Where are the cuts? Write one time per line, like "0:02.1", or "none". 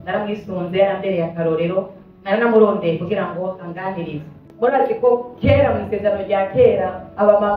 0:04.5